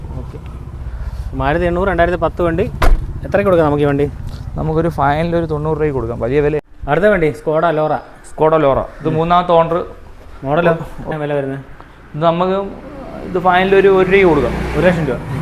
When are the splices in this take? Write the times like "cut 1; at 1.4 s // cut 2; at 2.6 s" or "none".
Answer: cut 1; at 6.6 s // cut 2; at 11.1 s